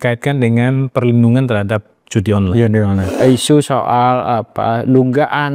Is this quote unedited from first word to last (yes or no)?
no